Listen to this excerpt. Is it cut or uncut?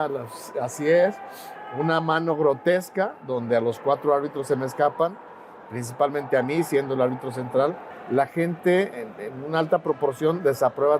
cut